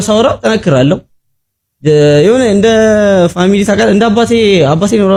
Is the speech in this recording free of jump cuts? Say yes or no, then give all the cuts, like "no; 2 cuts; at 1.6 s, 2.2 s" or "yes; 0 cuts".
yes; 0 cuts